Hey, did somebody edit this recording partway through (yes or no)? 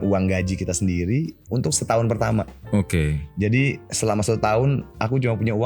yes